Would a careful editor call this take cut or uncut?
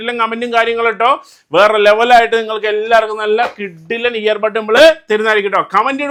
uncut